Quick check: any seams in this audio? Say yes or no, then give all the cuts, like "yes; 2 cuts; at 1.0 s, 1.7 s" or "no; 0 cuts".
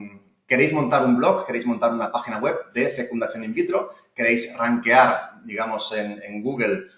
no; 0 cuts